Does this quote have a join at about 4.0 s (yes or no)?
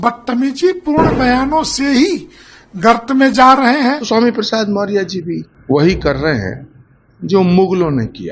yes